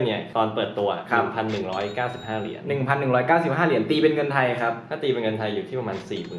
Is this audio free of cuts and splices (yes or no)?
yes